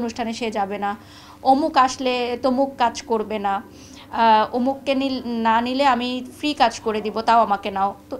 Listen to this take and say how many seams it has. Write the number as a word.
zero